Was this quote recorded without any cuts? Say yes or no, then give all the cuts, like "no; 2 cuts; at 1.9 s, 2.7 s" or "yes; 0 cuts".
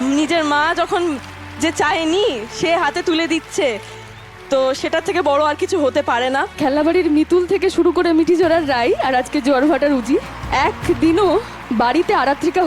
no; 3 cuts; at 6.6 s, 10.4 s, 11.6 s